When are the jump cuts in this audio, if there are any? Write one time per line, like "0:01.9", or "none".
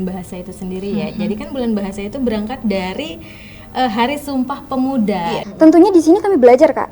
0:05.4